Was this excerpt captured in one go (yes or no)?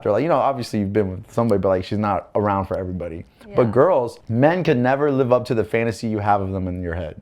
no